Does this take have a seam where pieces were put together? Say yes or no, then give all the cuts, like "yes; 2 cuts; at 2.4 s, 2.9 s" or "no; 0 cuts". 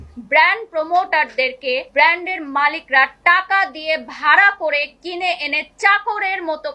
yes; 1 cut; at 1.9 s